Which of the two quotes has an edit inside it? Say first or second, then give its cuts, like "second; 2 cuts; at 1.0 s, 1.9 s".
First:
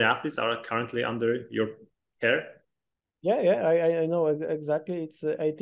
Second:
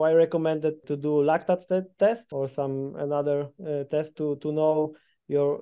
second; 2 cuts; at 0.8 s, 2.3 s